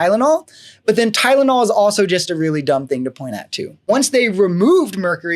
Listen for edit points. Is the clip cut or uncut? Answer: cut